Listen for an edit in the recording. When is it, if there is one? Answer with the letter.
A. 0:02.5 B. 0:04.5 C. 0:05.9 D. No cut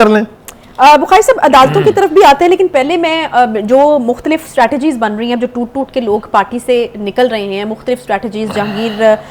D